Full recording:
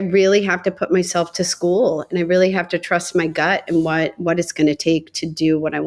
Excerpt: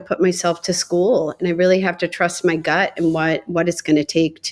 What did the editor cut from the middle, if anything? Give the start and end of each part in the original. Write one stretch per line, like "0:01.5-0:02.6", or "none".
none